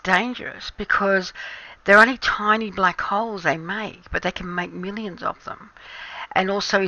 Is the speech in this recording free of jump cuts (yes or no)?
yes